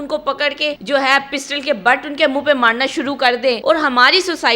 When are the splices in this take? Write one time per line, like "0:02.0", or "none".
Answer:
0:00.8
0:03.6